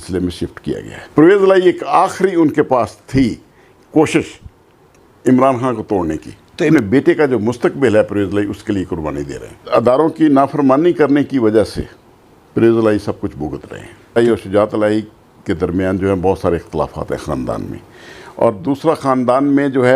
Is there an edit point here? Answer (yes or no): yes